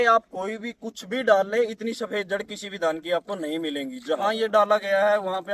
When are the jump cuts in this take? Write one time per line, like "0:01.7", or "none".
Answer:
none